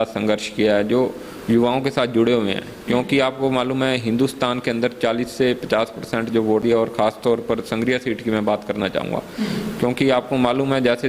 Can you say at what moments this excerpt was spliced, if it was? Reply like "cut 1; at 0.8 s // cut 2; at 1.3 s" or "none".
cut 1; at 6.6 s